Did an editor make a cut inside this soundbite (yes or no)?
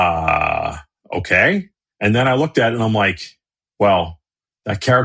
yes